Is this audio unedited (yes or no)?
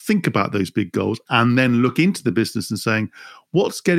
yes